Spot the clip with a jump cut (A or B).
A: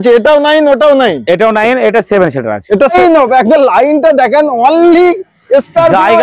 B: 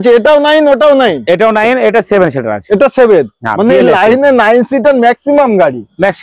A